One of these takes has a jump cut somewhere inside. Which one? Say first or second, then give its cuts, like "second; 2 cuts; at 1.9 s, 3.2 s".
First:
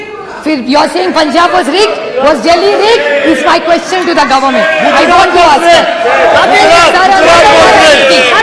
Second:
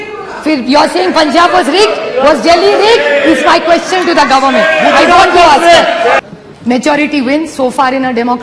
second; 1 cut; at 6.2 s